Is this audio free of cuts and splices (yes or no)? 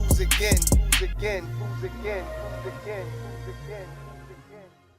yes